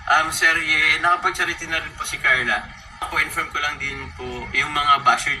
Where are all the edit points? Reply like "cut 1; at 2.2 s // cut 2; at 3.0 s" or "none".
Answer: cut 1; at 3.0 s